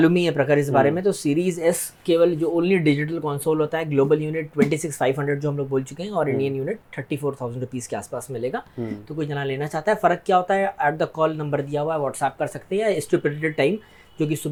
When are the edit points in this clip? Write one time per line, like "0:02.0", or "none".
none